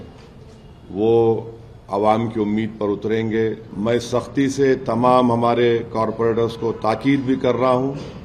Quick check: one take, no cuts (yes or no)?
no